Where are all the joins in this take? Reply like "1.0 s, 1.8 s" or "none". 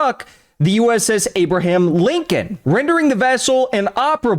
2.5 s

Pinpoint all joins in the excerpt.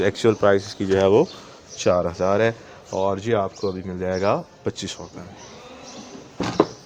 none

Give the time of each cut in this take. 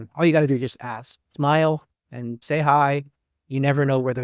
none

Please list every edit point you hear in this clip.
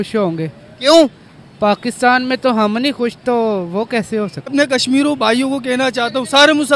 4.5 s

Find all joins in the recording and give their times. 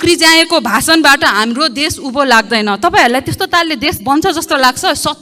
none

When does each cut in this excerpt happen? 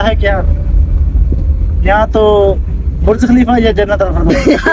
none

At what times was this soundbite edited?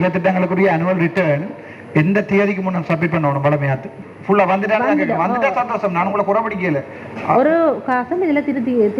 3.9 s

